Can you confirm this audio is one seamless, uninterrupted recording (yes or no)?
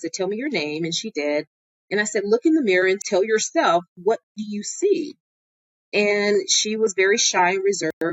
no